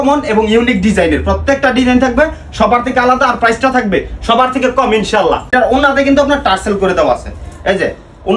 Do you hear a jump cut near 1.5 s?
no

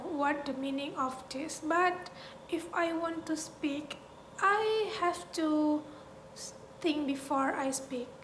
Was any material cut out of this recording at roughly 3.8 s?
no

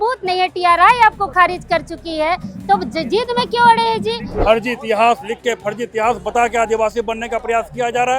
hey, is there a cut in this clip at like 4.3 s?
yes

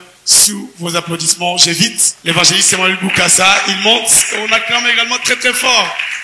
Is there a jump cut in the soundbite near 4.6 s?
no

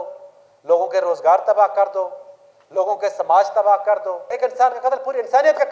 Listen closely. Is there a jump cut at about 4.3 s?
yes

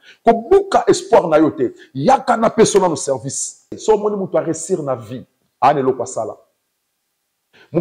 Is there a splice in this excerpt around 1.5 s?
no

